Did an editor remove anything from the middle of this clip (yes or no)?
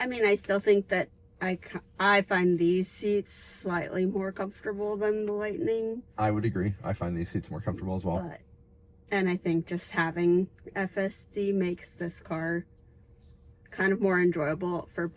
no